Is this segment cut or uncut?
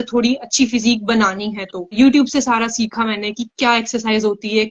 cut